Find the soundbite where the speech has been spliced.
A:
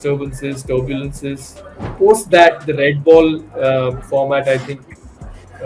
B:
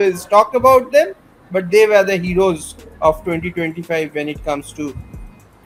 A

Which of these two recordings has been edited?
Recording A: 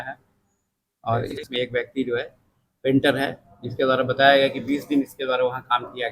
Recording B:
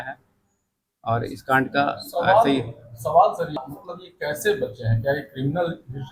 A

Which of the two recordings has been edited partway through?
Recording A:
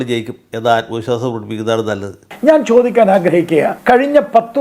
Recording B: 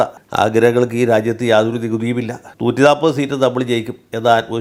A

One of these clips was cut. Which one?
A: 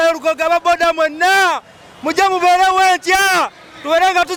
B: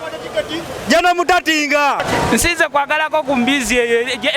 B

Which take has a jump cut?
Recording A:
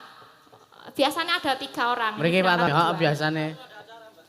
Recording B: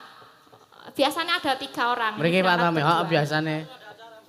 A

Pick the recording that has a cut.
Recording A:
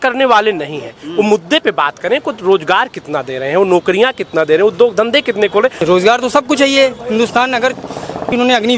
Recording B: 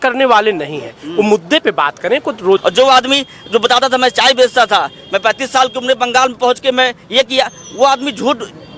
B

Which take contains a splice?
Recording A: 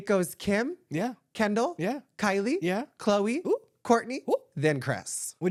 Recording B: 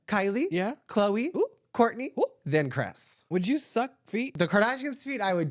B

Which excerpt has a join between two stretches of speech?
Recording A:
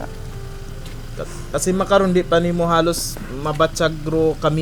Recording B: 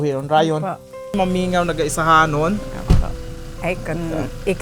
B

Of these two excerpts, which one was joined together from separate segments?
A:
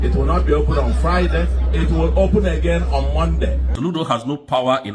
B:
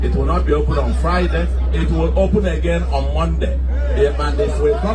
A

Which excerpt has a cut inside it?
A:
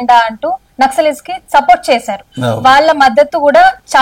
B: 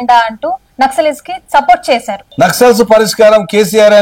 B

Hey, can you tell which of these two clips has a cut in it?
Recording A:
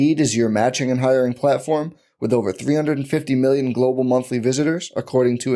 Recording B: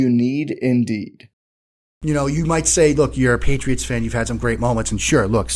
B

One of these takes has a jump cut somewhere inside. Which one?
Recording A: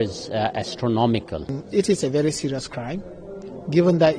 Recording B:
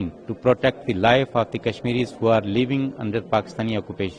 A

